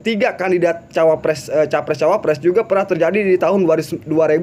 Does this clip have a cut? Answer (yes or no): no